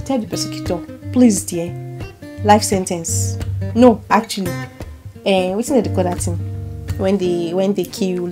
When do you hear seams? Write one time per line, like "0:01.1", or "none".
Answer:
none